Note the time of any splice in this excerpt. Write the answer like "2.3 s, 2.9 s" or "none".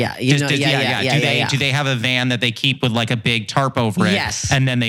none

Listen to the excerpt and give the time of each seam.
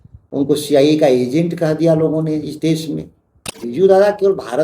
3.6 s

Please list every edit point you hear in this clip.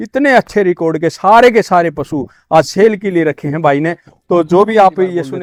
none

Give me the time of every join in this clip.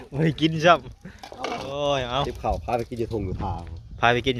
none

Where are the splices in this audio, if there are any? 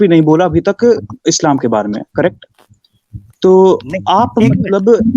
none

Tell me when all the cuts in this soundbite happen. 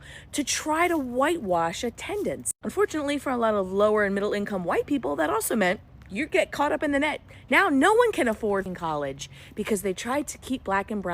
8.7 s

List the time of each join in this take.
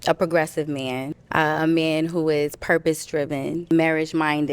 1.2 s, 3.6 s

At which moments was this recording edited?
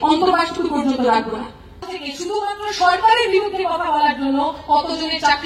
1.8 s

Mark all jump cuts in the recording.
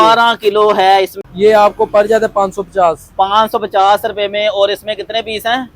1.2 s

